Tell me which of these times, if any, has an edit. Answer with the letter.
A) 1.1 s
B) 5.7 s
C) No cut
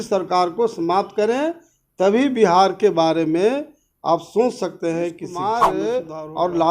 B